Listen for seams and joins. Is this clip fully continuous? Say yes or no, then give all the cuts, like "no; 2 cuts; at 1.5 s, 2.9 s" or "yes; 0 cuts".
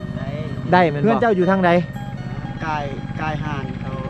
no; 1 cut; at 1.1 s